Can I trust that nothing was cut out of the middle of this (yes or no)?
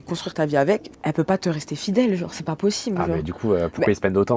no